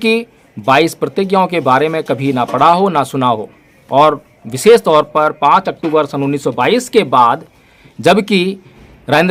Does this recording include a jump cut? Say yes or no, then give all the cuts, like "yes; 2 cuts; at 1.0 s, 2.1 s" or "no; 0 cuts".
no; 0 cuts